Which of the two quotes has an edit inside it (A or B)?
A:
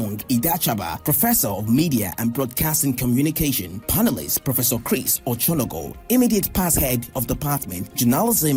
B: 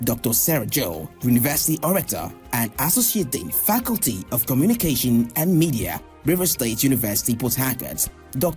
B